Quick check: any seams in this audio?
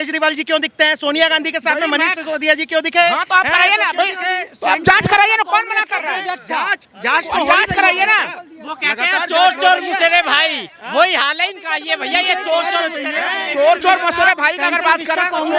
no; 0 cuts

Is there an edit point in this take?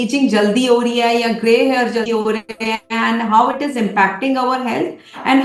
no; 0 cuts

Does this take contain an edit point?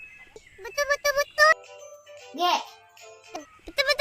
yes; 1 cut; at 1.4 s

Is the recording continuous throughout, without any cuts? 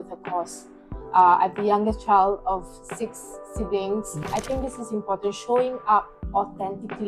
no; 1 cut; at 4.2 s

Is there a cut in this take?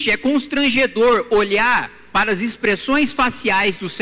no; 0 cuts

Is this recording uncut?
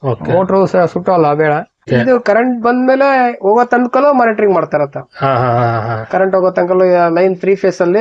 no; 1 cut; at 1.8 s

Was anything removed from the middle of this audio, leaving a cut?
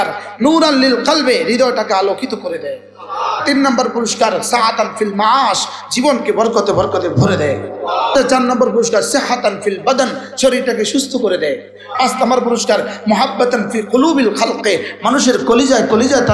yes; 3 cuts; at 3.4 s, 8.1 s, 11.9 s

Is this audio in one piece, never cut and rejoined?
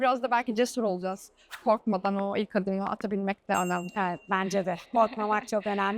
yes; 0 cuts

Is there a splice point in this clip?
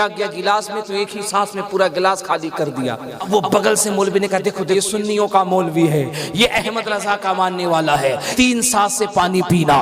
yes; 3 cuts; at 3.3 s, 4.7 s, 8.3 s

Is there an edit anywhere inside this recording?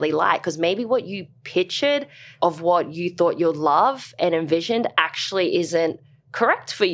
yes; 1 cut; at 2.3 s

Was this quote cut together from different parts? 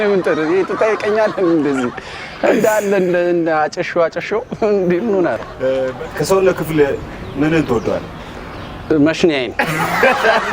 yes; 1 cut; at 6.0 s

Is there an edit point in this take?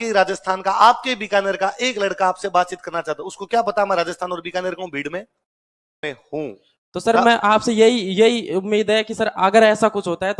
yes; 1 cut; at 6.1 s

